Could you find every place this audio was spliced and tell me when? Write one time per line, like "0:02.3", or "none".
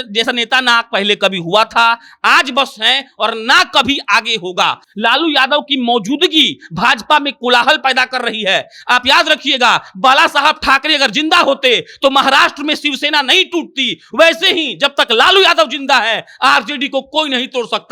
none